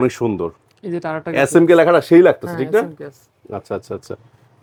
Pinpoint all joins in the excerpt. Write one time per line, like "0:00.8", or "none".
none